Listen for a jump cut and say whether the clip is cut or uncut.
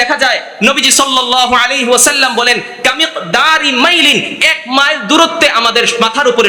uncut